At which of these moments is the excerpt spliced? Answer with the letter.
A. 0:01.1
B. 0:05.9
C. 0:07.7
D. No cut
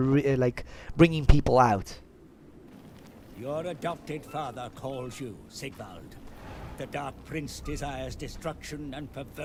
D